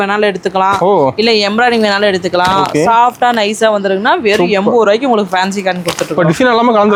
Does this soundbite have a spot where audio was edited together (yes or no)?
no